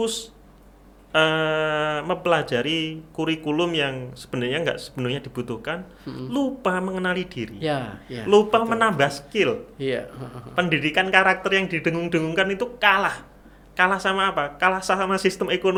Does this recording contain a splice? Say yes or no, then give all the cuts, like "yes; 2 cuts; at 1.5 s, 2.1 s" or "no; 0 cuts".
no; 0 cuts